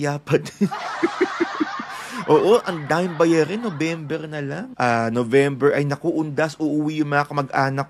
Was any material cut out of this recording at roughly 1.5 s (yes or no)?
no